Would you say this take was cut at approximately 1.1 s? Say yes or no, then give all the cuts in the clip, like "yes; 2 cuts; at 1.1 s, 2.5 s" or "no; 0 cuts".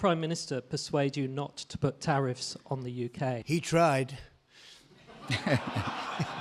no; 1 cut; at 3.4 s